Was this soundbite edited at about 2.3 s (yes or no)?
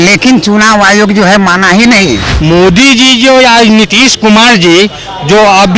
yes